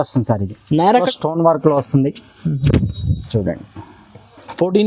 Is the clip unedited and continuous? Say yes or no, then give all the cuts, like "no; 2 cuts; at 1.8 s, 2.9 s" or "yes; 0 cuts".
no; 1 cut; at 1.1 s